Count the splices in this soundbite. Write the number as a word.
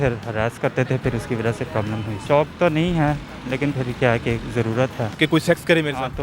two